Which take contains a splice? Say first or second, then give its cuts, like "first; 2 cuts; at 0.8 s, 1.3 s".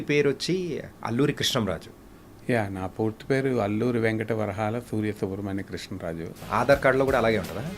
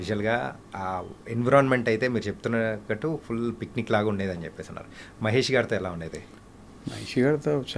first; 1 cut; at 6.4 s